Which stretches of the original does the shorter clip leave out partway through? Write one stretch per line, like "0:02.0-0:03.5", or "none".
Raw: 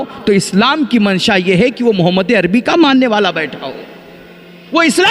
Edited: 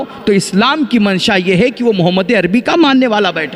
none